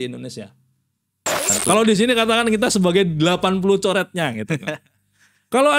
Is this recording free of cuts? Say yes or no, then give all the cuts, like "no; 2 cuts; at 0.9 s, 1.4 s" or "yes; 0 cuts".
no; 1 cut; at 1.5 s